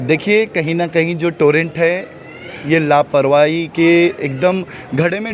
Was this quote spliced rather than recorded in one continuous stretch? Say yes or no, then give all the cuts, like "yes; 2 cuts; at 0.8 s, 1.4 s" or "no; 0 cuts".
no; 0 cuts